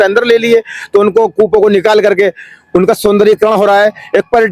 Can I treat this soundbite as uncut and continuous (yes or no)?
yes